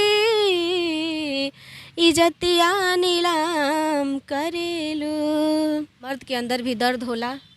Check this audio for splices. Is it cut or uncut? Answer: cut